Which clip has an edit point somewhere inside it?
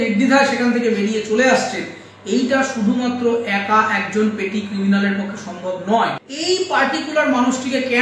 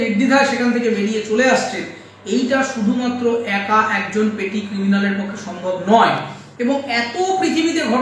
first; 1 cut; at 6.3 s

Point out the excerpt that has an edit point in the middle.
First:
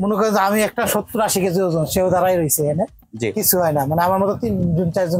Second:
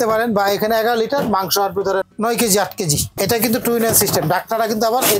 second; 2 cuts; at 2.1 s, 3.1 s

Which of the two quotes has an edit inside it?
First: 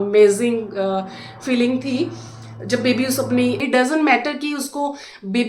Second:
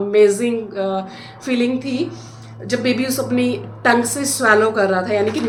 first; 1 cut; at 3.8 s

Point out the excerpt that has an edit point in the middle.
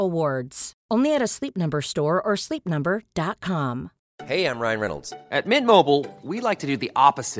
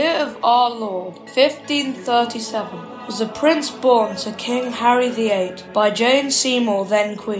first; 1 cut; at 4.0 s

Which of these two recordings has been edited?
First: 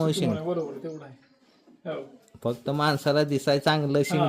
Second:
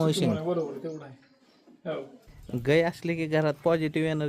second; 1 cut; at 2.3 s

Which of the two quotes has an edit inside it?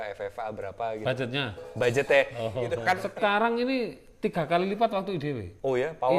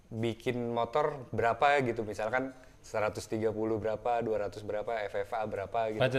first; 1 cut; at 3.0 s

